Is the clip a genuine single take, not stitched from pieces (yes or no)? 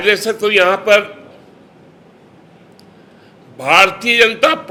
yes